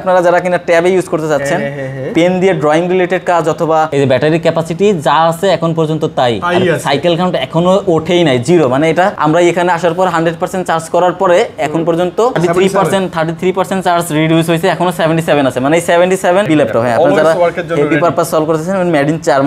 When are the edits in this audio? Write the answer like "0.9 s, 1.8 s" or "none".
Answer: 3.9 s, 9.2 s, 12.4 s, 16.5 s